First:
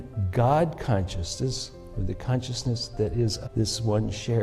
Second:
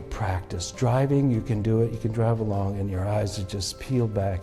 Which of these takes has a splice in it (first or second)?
first